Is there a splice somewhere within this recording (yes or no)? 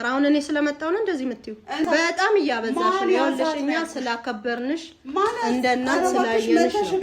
yes